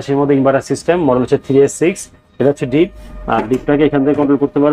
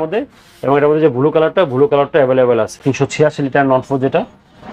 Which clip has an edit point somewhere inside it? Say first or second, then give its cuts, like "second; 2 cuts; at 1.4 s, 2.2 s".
second; 1 cut; at 2.8 s